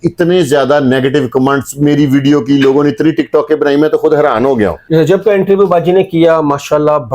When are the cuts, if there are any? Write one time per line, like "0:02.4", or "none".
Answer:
0:04.8